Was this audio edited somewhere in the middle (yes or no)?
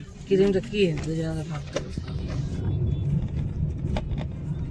yes